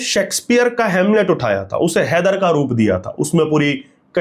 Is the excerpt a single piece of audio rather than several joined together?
yes; 0 cuts

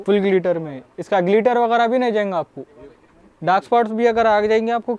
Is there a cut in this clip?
no; 0 cuts

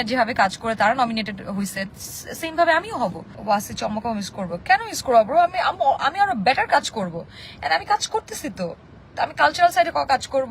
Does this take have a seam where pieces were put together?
yes; 1 cut; at 3.3 s

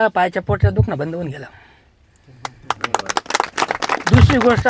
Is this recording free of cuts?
yes; 0 cuts

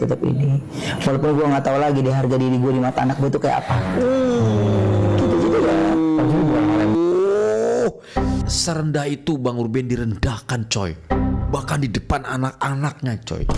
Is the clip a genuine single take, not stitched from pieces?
yes; 0 cuts

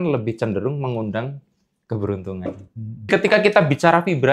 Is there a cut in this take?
yes; 1 cut; at 3.1 s

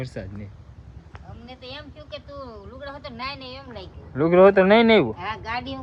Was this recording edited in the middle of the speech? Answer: no; 0 cuts

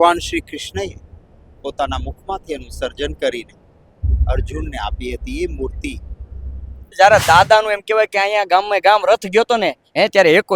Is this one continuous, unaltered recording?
no; 1 cut; at 6.9 s

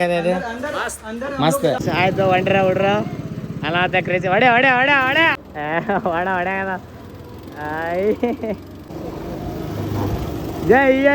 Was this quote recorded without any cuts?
no; 3 cuts; at 1.8 s, 5.4 s, 8.8 s

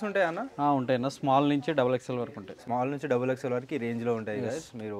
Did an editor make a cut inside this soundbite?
no; 0 cuts

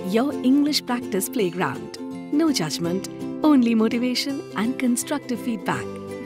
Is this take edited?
no; 0 cuts

